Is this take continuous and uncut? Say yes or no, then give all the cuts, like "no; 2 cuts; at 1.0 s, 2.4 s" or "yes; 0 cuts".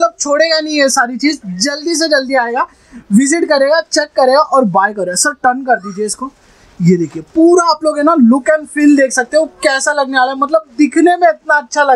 yes; 0 cuts